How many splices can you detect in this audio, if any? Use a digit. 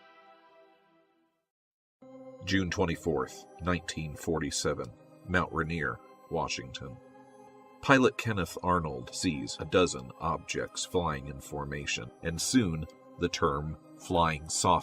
1